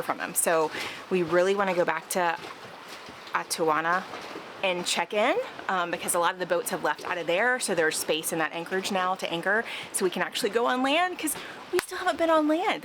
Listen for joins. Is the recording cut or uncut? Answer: uncut